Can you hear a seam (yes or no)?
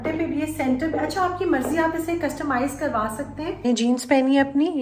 yes